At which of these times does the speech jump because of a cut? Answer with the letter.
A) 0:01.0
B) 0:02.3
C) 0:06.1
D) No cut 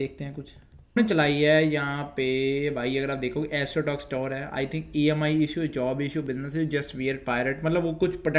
A